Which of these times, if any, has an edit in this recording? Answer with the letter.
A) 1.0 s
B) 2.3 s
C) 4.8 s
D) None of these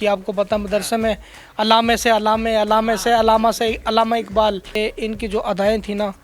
C